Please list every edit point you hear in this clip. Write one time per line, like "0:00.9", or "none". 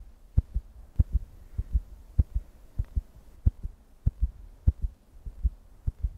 0:03.0